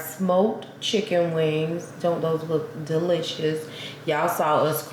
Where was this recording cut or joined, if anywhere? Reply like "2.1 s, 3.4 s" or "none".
none